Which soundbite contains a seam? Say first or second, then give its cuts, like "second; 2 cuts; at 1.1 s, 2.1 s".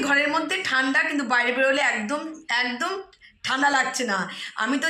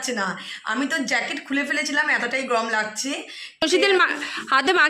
second; 1 cut; at 3.6 s